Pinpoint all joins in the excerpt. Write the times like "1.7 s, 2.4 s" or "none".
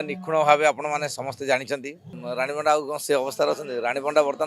2.1 s